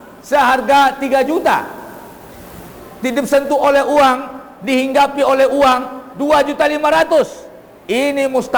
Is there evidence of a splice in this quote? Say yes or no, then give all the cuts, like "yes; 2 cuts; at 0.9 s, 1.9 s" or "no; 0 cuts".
no; 0 cuts